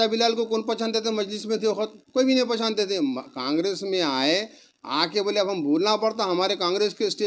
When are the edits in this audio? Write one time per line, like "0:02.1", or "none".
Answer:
none